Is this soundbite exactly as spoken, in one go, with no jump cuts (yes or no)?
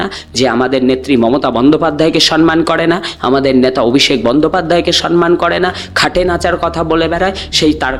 yes